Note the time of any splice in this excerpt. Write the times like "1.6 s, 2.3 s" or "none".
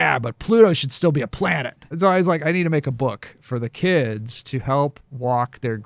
1.8 s

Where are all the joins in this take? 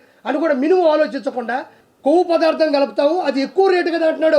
1.7 s

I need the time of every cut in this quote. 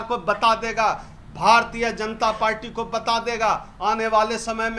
none

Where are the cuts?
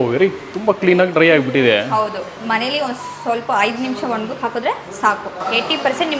2.4 s, 5.4 s

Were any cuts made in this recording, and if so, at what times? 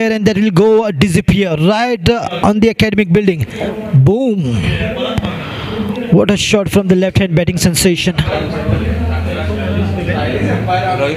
2.4 s

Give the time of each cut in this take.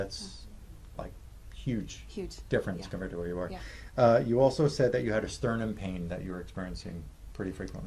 none

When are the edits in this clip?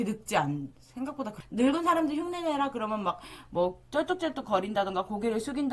1.4 s

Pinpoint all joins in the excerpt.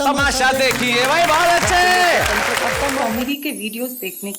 3.0 s

